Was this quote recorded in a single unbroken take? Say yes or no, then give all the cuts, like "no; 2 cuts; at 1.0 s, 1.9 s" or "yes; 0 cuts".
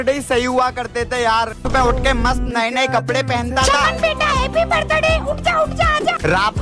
yes; 0 cuts